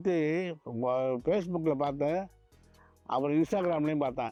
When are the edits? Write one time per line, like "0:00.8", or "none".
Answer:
none